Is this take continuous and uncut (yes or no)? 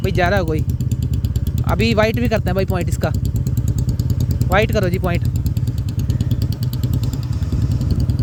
yes